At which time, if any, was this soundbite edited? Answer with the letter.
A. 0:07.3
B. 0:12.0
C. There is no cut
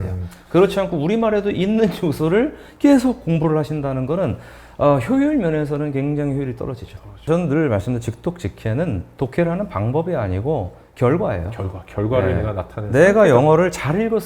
A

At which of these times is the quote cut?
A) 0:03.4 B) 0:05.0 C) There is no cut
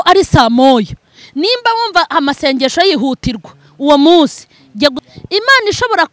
B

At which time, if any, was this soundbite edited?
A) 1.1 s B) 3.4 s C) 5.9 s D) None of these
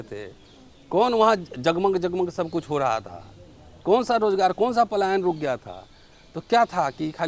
D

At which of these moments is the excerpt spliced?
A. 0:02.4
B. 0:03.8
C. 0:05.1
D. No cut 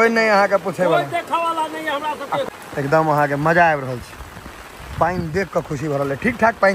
A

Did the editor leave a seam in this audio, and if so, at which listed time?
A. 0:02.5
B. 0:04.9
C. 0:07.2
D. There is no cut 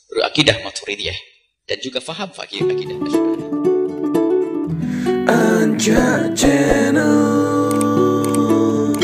A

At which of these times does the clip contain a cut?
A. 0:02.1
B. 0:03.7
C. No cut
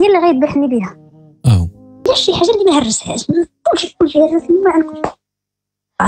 A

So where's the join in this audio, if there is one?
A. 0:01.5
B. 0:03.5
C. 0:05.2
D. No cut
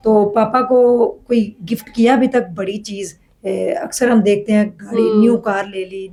D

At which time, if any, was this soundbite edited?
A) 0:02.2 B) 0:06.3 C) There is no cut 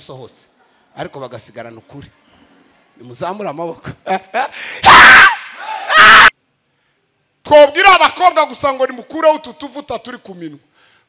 B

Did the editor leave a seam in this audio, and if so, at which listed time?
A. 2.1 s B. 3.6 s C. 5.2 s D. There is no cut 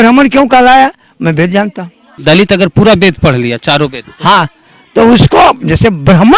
A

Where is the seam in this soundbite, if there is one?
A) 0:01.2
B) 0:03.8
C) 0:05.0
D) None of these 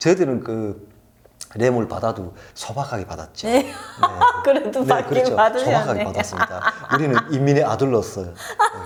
D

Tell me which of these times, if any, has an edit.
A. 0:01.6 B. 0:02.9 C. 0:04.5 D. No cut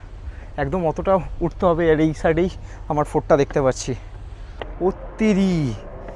C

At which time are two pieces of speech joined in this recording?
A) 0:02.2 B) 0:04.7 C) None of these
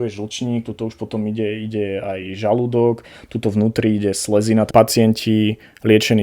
B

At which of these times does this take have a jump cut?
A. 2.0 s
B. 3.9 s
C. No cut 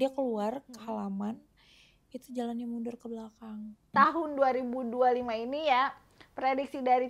B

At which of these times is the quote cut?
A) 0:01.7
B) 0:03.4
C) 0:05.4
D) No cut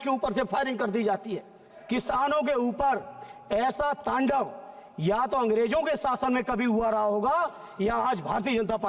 A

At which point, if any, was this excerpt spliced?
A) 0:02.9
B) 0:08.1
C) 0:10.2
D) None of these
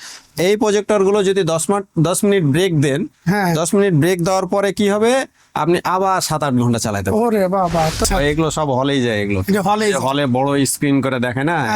B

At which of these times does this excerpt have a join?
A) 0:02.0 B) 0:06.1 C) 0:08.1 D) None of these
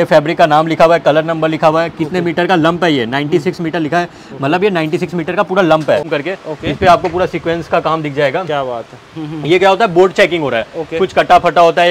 B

